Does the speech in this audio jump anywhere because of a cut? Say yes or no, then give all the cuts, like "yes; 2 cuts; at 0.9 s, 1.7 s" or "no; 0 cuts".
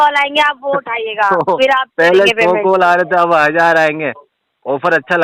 no; 0 cuts